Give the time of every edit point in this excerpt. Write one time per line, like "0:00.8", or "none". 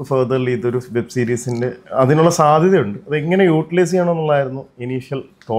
none